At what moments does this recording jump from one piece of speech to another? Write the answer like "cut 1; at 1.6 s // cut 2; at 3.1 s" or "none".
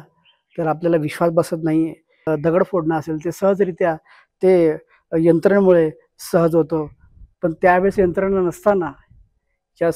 cut 1; at 2.1 s